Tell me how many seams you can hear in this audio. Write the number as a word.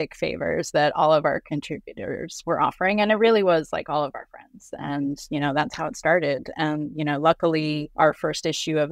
three